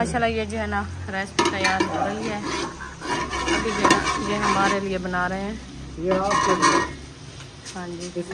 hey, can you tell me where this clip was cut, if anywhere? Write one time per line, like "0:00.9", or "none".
none